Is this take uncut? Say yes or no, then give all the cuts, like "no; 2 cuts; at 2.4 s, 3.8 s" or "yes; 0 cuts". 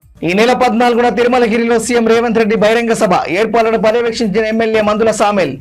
yes; 0 cuts